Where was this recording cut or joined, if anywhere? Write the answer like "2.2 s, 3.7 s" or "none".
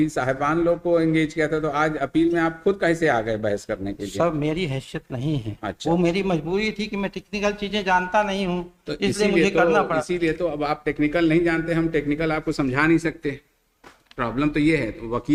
none